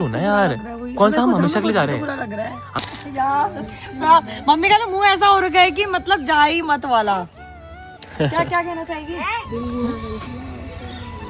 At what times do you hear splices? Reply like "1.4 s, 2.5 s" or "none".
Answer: 2.6 s